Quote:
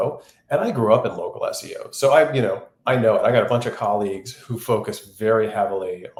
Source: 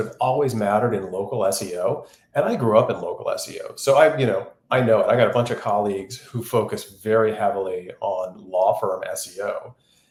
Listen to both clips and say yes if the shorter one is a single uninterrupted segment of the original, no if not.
yes